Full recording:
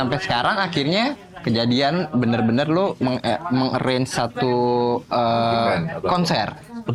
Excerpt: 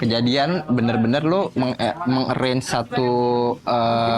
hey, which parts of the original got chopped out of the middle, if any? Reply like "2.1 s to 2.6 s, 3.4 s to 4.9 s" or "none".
none